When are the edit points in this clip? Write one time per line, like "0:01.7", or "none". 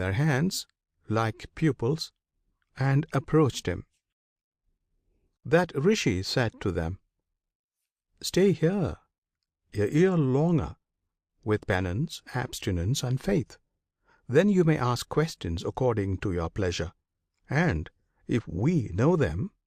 none